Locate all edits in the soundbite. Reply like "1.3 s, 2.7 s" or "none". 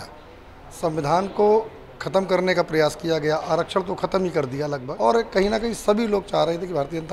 4.9 s

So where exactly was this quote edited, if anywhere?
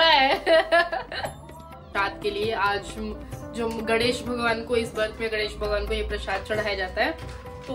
1.9 s

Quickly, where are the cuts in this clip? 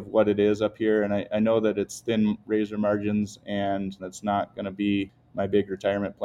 4.0 s, 5.2 s

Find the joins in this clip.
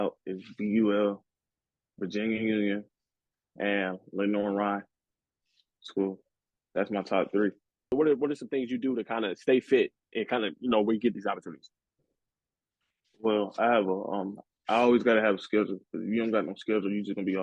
7.9 s

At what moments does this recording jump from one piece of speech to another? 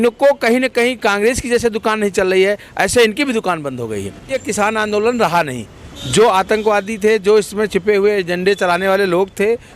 4.4 s

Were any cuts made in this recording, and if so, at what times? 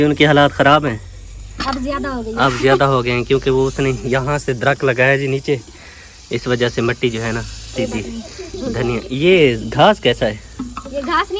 none

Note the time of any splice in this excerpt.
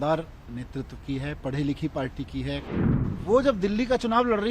2.6 s

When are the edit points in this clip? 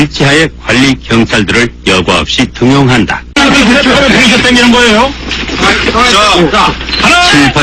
6.2 s

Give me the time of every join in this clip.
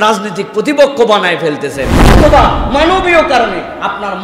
2.2 s

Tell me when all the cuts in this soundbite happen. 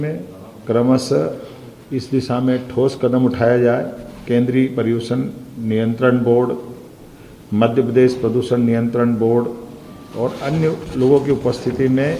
4.2 s

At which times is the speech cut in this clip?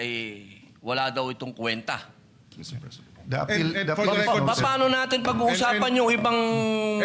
2.6 s

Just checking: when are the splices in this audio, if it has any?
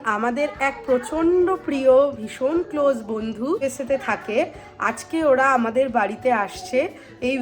3.7 s

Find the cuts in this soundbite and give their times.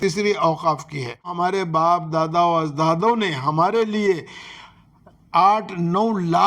1.3 s

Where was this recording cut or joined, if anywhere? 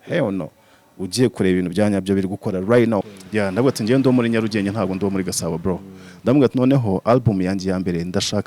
3.1 s

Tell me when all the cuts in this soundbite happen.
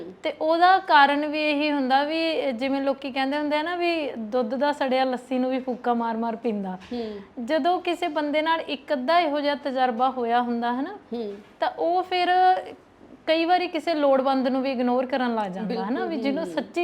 none

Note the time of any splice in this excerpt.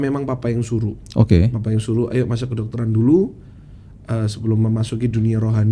none

